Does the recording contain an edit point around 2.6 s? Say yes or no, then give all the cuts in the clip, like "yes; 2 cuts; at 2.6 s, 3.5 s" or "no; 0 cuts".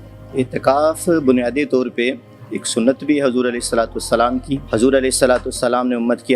no; 1 cut; at 4.6 s